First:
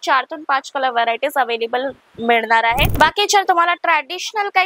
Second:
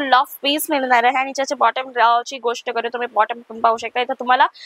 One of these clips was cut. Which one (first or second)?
first